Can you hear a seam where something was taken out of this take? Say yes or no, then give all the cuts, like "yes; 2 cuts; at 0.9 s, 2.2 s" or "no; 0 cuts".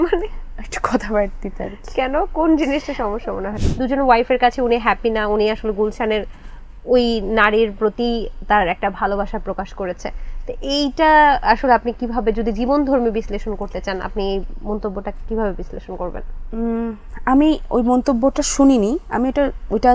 yes; 1 cut; at 3.5 s